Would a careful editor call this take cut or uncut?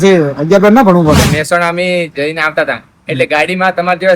cut